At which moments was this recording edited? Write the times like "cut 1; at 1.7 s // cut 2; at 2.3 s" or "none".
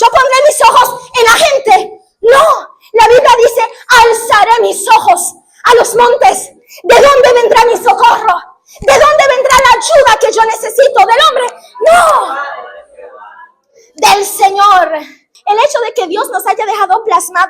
cut 1; at 15.3 s